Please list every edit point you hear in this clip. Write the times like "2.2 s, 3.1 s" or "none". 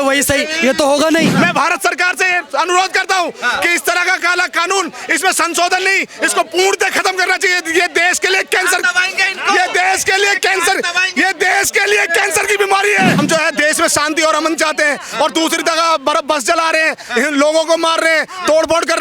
1.3 s, 13.2 s